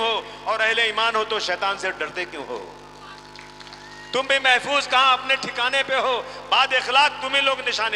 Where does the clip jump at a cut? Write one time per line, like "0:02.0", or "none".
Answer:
none